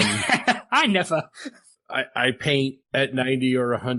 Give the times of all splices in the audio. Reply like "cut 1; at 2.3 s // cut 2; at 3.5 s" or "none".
none